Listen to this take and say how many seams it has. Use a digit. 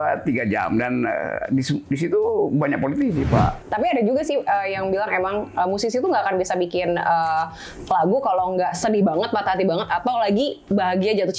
1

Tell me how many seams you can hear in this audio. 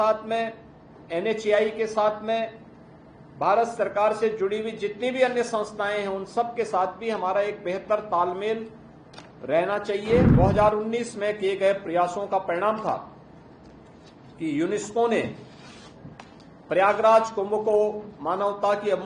1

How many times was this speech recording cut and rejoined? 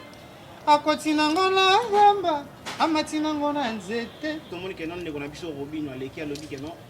1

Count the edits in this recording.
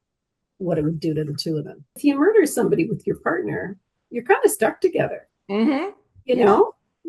1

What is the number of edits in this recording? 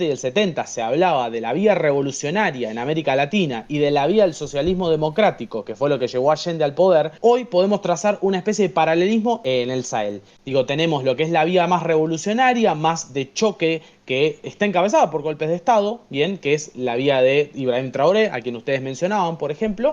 2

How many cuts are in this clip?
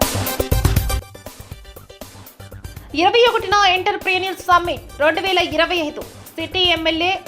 2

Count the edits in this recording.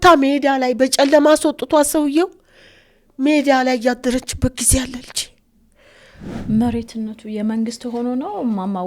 1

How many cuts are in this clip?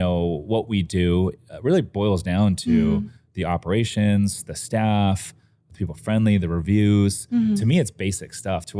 0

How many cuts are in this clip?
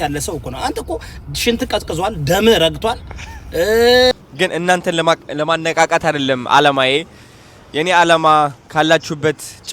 1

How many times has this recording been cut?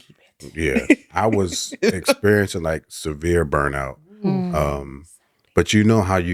0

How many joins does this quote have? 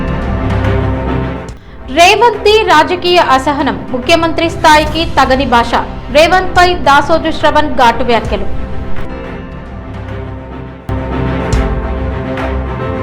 2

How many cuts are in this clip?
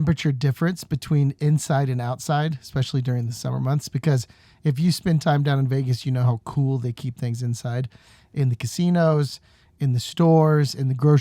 0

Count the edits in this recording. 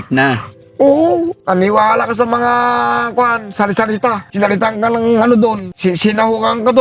3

